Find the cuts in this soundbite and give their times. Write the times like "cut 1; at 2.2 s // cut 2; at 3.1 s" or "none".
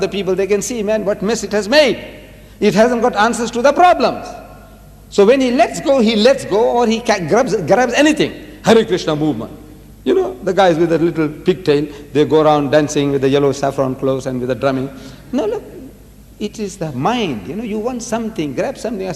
cut 1; at 2.7 s

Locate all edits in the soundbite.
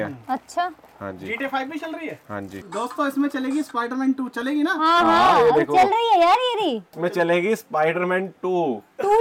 cut 1; at 2.6 s

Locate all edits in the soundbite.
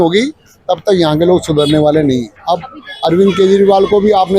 cut 1; at 2.3 s

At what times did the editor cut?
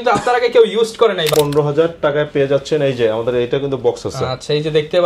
cut 1; at 1.3 s

